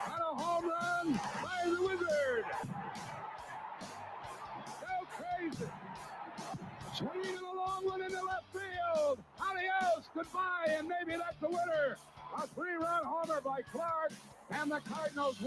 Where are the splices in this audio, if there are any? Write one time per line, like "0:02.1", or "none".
0:11.3
0:13.1